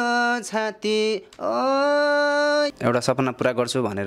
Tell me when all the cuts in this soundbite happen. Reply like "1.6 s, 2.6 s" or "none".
2.7 s